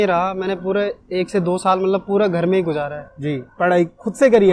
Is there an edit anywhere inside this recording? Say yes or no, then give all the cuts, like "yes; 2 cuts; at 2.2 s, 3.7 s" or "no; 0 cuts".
no; 0 cuts